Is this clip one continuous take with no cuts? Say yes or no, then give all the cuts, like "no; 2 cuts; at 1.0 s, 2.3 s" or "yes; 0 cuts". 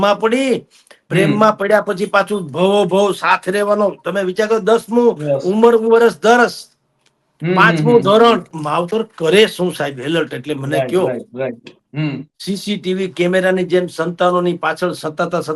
no; 1 cut; at 8.5 s